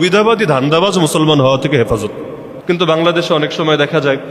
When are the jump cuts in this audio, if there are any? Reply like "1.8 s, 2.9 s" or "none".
2.5 s